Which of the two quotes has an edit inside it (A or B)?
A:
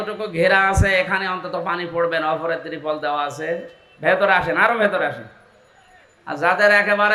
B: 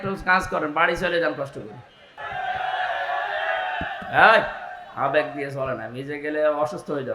B